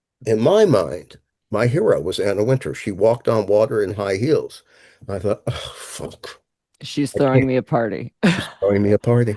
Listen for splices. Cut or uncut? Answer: uncut